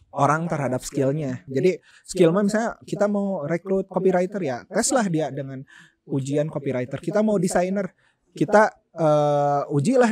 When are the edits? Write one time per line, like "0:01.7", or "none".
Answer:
0:01.4